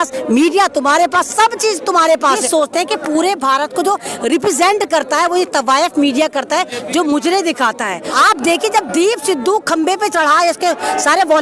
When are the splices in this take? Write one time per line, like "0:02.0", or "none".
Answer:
0:02.3
0:08.1